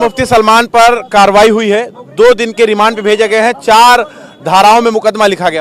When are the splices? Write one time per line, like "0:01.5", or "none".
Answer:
none

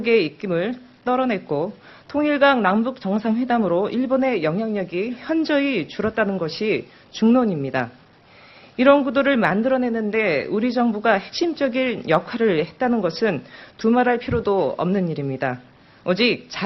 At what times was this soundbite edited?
none

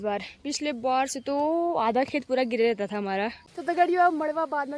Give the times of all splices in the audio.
0:03.5

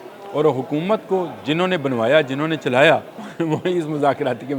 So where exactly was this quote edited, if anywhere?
0:03.2

